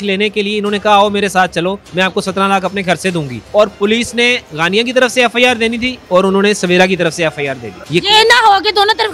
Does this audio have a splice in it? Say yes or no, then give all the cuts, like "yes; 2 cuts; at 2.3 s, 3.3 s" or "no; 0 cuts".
yes; 4 cuts; at 1.8 s, 3.3 s, 5.9 s, 7.8 s